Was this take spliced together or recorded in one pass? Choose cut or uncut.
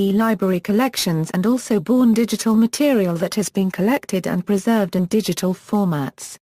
cut